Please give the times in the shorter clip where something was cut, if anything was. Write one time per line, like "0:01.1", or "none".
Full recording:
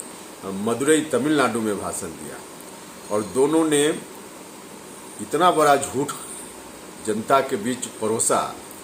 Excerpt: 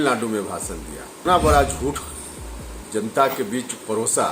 0:01.2